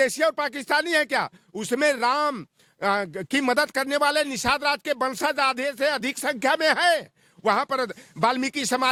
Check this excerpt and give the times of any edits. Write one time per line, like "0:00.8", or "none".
none

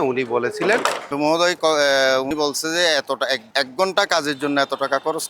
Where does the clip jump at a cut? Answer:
0:01.1
0:02.3
0:03.4

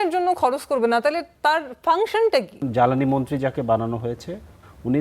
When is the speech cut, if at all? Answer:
0:02.6

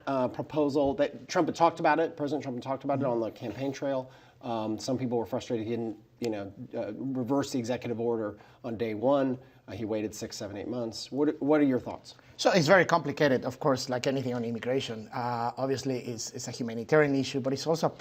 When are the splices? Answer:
none

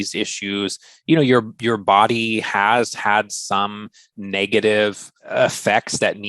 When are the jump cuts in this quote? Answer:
0:05.1

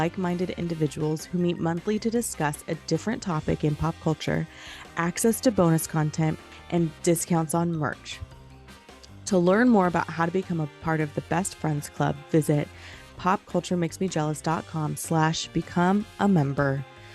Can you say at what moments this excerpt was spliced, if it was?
0:06.5

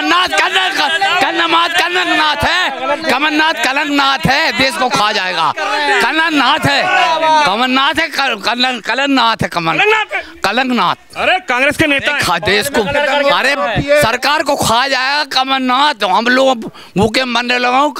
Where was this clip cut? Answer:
none

